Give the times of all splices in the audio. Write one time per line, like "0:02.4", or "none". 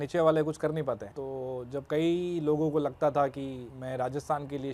0:01.1
0:03.7